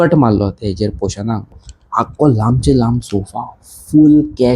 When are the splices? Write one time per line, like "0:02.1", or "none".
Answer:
0:01.5